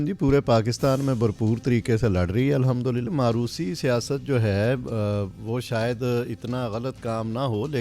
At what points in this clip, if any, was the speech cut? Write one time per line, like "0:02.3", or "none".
0:03.1